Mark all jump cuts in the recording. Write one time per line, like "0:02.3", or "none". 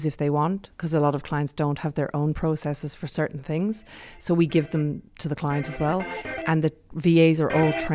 0:06.9